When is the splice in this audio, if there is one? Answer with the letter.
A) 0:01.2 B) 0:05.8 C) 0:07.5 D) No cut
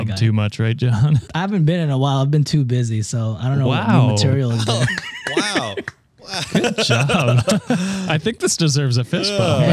A